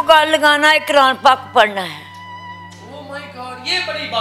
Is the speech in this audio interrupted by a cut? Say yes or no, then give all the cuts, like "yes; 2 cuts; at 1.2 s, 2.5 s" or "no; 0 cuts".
no; 0 cuts